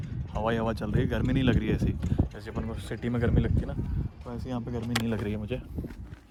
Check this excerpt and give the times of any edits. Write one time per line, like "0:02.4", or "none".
none